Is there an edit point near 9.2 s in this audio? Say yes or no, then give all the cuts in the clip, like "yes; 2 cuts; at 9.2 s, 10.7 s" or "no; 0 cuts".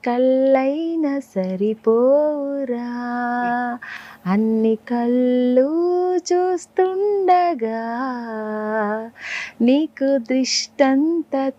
no; 0 cuts